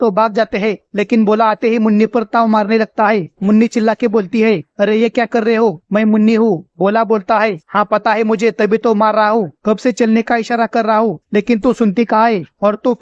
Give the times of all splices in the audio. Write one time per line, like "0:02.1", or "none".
none

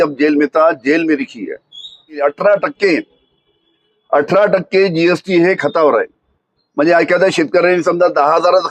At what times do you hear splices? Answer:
0:02.2

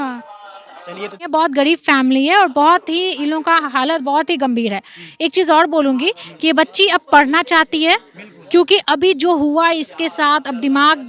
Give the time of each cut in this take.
0:01.0

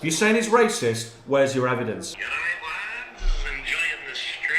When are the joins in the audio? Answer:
0:02.0

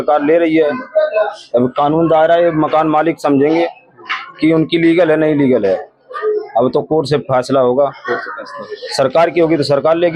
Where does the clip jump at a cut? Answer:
none

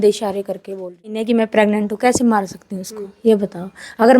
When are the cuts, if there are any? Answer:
0:01.3

